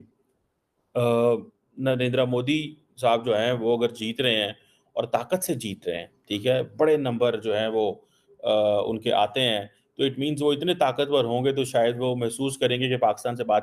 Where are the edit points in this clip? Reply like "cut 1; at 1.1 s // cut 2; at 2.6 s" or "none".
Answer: none